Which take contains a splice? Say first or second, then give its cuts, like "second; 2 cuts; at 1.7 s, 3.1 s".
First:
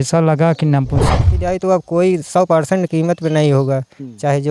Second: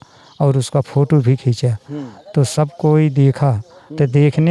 first; 1 cut; at 1.4 s